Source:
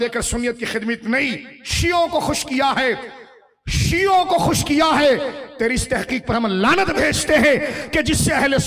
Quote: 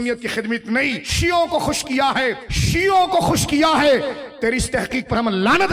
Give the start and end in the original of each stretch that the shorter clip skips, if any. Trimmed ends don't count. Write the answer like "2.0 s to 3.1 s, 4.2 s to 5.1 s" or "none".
1.4 s to 1.7 s, 3.1 s to 3.7 s